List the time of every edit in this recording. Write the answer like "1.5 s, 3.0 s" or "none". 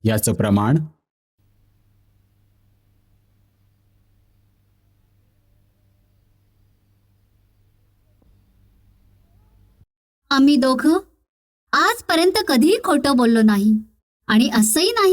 none